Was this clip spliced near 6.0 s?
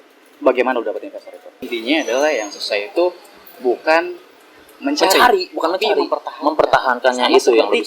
no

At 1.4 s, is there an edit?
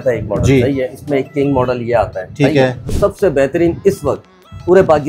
no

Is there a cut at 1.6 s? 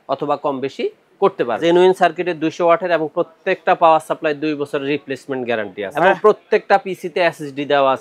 yes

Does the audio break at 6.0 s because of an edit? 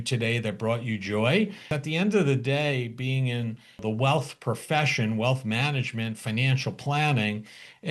no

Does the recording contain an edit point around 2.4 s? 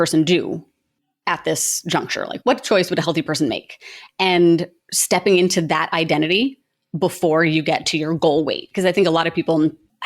yes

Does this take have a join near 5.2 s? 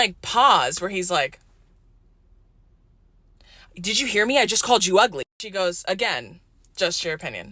yes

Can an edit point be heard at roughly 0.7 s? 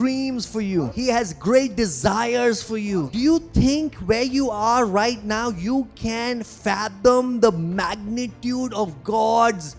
yes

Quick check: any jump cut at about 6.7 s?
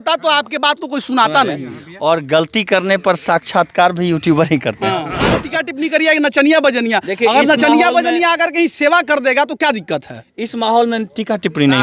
no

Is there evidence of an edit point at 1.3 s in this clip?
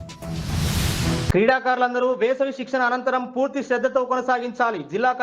yes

